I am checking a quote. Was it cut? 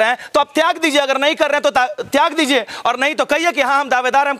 no; 0 cuts

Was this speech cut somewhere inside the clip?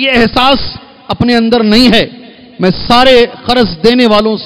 no; 0 cuts

